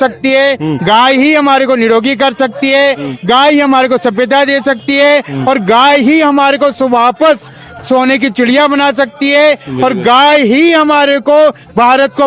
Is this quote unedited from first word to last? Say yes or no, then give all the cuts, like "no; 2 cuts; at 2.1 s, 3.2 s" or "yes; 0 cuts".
yes; 0 cuts